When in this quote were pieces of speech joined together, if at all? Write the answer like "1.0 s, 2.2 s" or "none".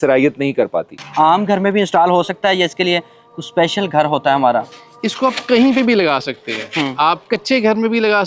1.0 s